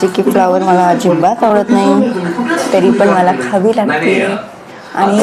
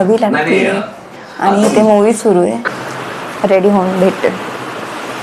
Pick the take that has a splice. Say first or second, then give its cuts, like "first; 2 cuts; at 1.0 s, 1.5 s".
second; 1 cut; at 2.6 s